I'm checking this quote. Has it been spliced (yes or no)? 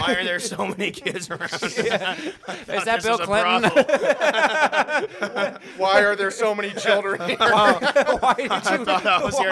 no